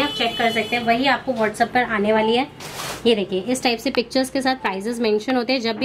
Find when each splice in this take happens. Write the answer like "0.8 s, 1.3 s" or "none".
none